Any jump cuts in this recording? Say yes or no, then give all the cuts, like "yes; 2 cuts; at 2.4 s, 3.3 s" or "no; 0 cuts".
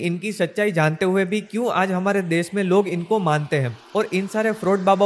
yes; 1 cut; at 3.8 s